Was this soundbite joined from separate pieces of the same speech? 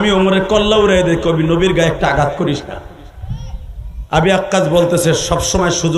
no; 0 cuts

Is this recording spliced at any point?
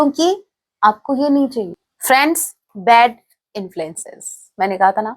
yes; 1 cut; at 1.9 s

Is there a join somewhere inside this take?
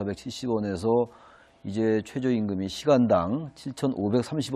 yes; 1 cut; at 2.1 s

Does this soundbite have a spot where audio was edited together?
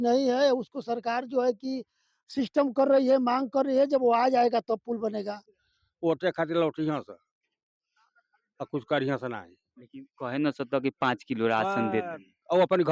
yes; 1 cut; at 5.4 s

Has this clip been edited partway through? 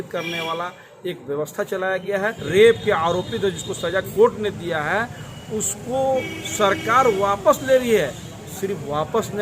yes; 1 cut; at 2.4 s

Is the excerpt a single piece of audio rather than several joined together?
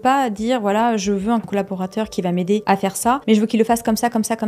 no; 2 cuts; at 1.5 s, 3.0 s

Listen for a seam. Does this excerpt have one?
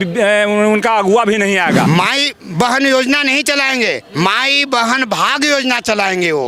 yes; 1 cut; at 1.9 s

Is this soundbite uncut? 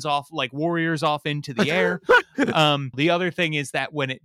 no; 1 cut; at 3.0 s

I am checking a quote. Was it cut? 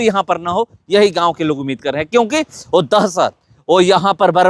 no; 0 cuts

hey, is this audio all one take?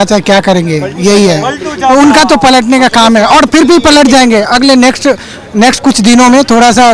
yes; 0 cuts

